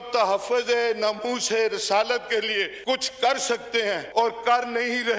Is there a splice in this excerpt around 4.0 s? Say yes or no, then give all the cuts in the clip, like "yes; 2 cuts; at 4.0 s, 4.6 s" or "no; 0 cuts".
yes; 2 cuts; at 2.7 s, 4.0 s